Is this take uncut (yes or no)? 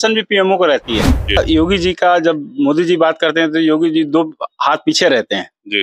no